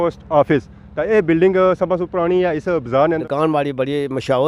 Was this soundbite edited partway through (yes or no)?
yes